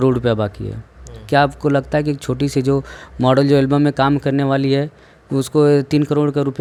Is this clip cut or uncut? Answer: uncut